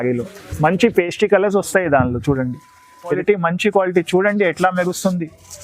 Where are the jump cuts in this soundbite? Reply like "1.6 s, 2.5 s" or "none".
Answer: 3.1 s